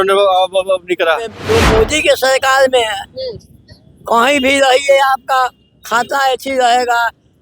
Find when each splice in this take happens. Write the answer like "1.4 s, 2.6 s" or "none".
1.4 s